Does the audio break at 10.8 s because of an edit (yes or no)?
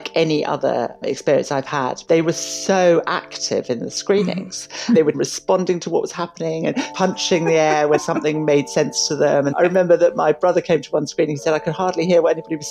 no